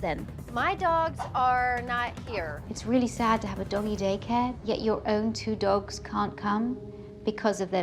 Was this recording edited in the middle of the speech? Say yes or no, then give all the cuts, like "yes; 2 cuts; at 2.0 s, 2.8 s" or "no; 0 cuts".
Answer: yes; 2 cuts; at 2.6 s, 4.6 s